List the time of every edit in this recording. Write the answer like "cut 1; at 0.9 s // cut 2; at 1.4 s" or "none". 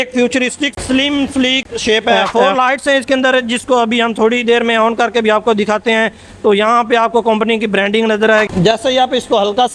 cut 1; at 0.8 s // cut 2; at 2.2 s // cut 3; at 8.5 s